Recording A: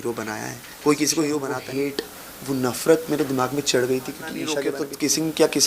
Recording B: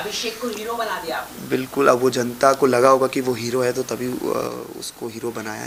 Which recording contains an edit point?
A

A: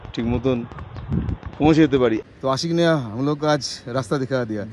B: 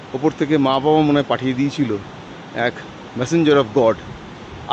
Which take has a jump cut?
A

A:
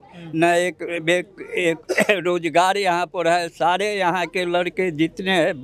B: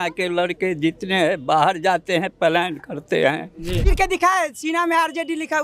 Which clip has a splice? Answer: B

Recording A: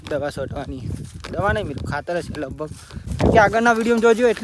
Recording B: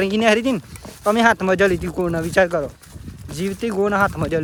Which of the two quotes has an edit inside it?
A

